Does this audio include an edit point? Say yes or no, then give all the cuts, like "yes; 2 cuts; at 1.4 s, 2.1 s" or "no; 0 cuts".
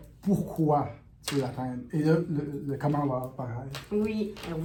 no; 0 cuts